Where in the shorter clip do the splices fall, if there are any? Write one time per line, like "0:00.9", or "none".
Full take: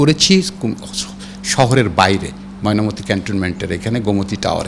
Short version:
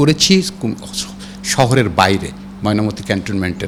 none